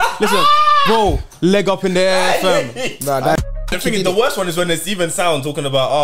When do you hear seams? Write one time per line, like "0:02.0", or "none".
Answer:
0:03.4